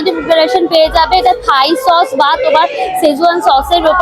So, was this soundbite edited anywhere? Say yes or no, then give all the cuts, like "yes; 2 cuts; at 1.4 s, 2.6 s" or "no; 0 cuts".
no; 0 cuts